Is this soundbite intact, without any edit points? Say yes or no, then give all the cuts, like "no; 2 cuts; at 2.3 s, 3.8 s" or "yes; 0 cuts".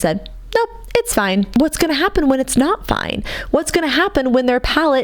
no; 1 cut; at 1.5 s